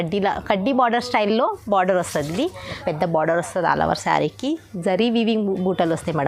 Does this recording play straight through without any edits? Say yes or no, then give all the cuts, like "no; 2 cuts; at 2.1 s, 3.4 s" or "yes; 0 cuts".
no; 1 cut; at 2.8 s